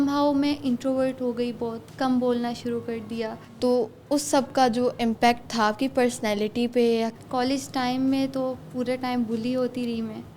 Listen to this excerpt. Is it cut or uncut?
cut